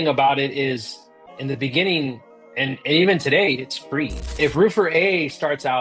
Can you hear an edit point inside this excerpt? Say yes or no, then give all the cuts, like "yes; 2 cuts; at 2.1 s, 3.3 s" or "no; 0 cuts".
yes; 1 cut; at 4.2 s